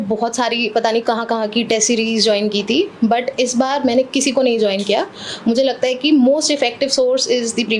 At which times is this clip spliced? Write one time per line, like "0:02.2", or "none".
none